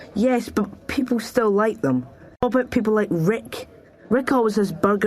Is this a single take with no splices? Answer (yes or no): no